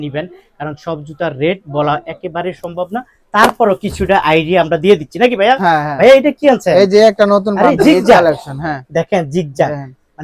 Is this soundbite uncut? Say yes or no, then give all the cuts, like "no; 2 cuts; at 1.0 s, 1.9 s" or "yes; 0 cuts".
yes; 0 cuts